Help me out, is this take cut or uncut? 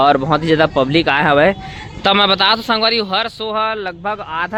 uncut